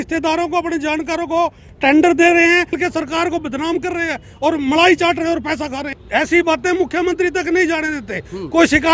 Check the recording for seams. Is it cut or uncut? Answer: cut